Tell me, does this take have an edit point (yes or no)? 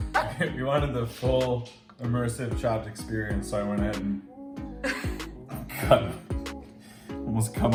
no